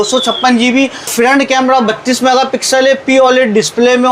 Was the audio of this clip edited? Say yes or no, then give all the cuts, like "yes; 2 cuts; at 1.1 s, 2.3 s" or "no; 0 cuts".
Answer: yes; 1 cut; at 1.1 s